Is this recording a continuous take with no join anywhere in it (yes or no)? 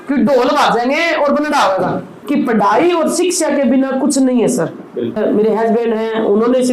no